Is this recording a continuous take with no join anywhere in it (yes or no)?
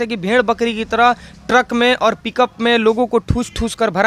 yes